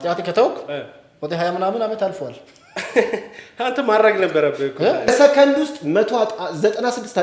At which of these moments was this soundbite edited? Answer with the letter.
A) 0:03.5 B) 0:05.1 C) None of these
B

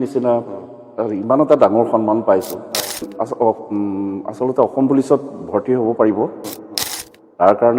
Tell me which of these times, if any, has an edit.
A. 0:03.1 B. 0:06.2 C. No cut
A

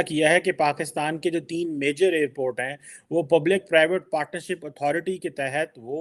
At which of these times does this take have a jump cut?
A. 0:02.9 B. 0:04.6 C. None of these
C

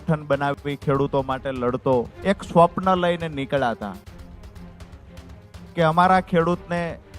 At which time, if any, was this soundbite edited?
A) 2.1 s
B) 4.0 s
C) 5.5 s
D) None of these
A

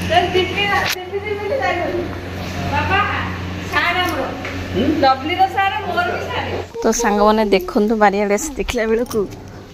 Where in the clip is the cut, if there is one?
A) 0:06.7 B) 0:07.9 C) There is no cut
A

